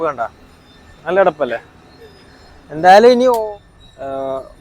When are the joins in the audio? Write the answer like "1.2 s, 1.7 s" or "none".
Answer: 3.4 s